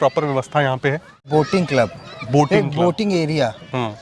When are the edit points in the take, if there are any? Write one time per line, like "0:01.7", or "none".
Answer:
0:01.2